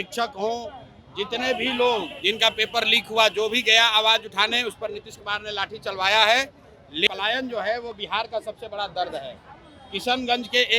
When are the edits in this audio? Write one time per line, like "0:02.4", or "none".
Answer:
0:07.1